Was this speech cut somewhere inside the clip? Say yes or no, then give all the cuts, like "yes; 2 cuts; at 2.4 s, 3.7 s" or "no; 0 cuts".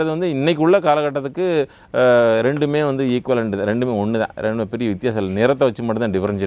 no; 0 cuts